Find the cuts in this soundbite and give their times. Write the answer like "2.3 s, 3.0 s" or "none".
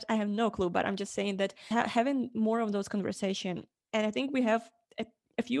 1.7 s